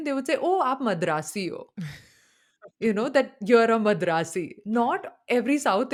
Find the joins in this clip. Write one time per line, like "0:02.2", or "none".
none

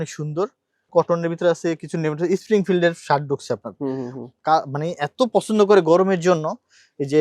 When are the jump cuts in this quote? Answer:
0:00.9

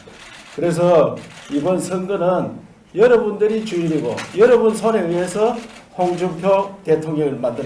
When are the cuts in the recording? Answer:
0:05.8

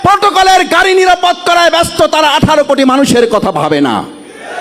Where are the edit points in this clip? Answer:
none

